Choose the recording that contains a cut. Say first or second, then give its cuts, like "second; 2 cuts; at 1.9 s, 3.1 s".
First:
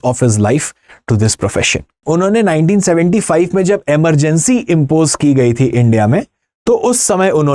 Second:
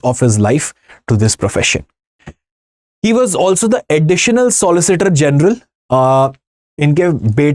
first; 1 cut; at 2.0 s